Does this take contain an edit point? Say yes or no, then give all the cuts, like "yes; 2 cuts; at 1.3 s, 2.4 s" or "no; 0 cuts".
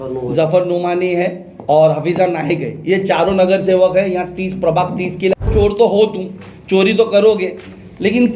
yes; 1 cut; at 5.4 s